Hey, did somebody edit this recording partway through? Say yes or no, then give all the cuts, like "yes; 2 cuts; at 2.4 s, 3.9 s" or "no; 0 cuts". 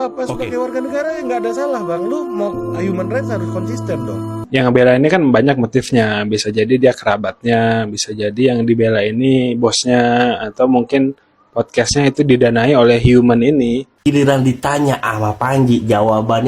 yes; 2 cuts; at 4.4 s, 13.9 s